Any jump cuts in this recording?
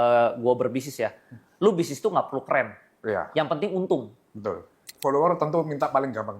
yes; 1 cut; at 4.9 s

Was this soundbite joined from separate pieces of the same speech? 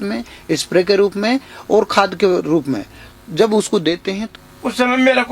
yes; 1 cut; at 4.2 s

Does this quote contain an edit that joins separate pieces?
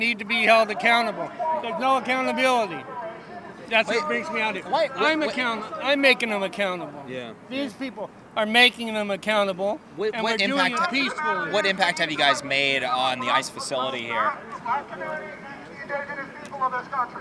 no; 0 cuts

